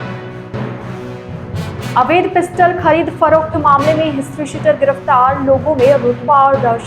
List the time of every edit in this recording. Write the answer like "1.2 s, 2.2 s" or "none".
1.8 s